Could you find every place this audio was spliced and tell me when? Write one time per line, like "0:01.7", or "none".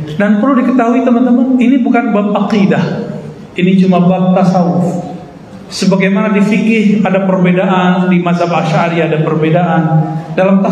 none